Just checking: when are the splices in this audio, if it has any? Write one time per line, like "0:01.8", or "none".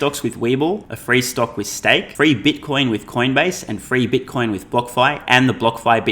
0:00.9
0:02.1

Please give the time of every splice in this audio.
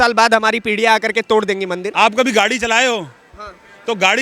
0:01.8

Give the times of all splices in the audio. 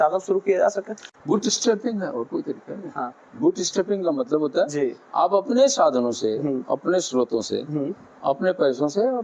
none

